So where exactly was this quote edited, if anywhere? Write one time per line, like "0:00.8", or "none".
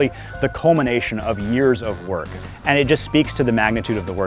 0:02.3